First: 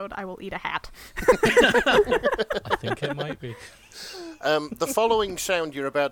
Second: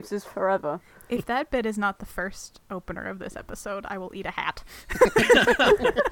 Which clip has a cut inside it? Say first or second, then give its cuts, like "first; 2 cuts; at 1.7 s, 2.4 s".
second; 1 cut; at 0.9 s